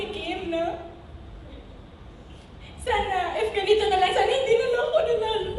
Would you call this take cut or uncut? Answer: uncut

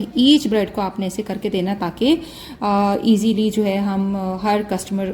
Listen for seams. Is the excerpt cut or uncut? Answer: uncut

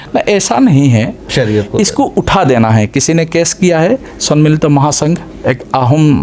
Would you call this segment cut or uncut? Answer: cut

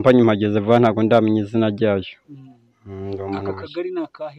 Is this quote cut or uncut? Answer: uncut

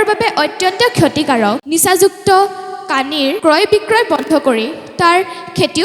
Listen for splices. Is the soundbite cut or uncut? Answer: cut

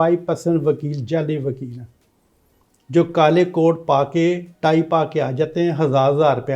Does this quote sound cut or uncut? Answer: uncut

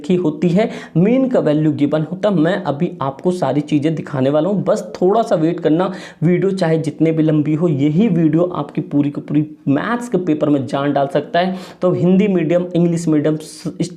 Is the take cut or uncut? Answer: uncut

